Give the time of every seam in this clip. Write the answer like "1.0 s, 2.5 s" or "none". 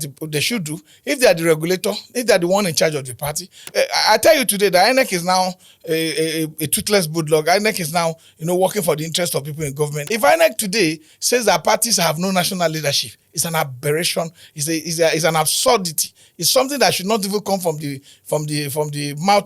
3.6 s, 10.0 s